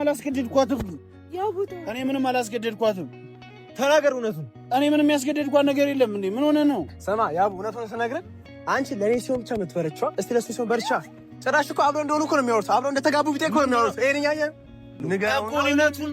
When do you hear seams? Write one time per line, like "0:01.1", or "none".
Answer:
0:15.0